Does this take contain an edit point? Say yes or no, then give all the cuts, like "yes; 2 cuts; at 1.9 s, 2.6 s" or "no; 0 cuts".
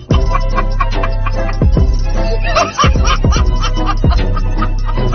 no; 0 cuts